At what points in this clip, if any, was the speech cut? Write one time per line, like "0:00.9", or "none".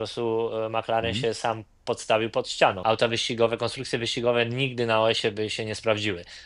0:02.8